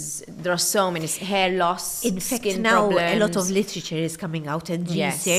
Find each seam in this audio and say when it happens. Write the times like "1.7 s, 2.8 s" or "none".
none